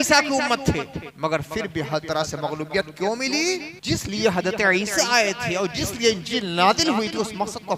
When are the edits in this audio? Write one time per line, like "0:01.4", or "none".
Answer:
0:01.0
0:03.7